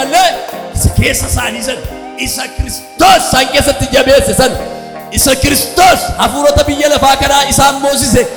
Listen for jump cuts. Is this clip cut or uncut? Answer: uncut